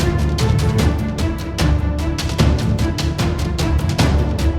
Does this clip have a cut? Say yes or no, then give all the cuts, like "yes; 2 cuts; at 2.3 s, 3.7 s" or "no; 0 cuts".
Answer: no; 0 cuts